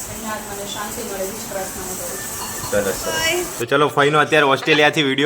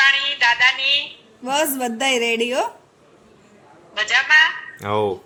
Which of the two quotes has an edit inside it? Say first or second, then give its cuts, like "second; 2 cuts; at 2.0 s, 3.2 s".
first; 1 cut; at 3.2 s